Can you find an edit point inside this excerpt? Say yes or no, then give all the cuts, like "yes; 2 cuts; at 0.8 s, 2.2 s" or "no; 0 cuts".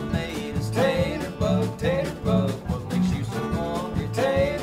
no; 0 cuts